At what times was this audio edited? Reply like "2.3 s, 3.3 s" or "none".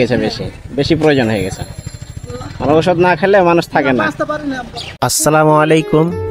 5.0 s